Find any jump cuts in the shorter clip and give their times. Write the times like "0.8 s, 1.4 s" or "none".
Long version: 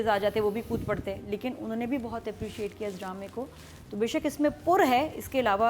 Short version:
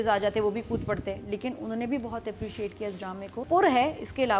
3.4 s